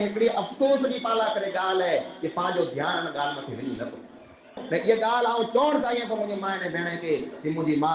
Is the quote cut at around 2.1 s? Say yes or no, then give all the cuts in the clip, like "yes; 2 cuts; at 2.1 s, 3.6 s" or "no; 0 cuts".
no; 1 cut; at 4.6 s